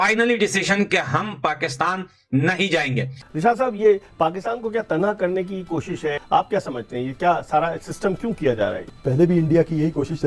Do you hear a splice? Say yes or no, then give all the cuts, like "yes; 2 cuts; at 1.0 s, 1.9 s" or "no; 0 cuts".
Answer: yes; 1 cut; at 3.2 s